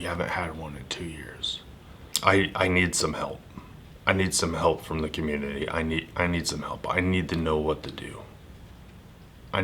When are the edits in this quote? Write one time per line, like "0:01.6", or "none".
0:02.0